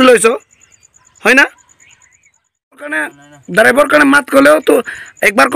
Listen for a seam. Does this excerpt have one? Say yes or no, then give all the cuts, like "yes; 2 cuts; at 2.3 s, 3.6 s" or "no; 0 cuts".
yes; 1 cut; at 3.0 s